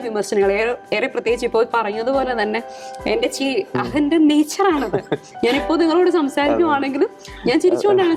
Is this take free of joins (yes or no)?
yes